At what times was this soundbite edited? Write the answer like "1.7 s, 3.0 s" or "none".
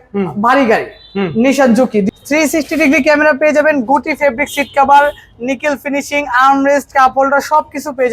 2.1 s